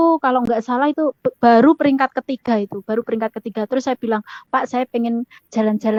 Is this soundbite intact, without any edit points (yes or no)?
yes